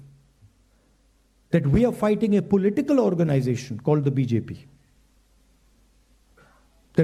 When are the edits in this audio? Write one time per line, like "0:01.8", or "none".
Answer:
none